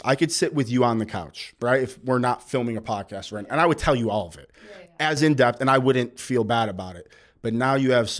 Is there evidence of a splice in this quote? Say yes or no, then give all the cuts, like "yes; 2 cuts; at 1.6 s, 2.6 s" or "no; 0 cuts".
no; 0 cuts